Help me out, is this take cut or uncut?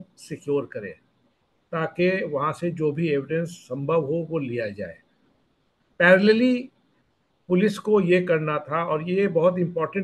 uncut